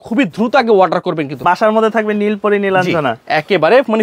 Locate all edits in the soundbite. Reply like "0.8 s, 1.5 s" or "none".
1.4 s